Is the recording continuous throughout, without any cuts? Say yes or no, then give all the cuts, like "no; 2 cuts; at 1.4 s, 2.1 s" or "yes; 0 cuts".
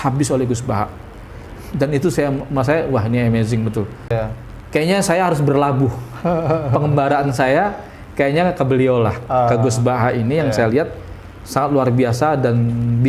no; 1 cut; at 4.1 s